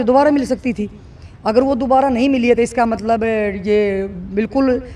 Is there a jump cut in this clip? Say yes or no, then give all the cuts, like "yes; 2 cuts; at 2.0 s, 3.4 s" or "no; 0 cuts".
no; 0 cuts